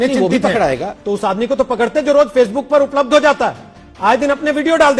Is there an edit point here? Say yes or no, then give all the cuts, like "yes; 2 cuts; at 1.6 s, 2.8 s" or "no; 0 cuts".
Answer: no; 0 cuts